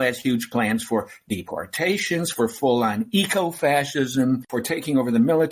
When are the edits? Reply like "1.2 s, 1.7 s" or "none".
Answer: 4.5 s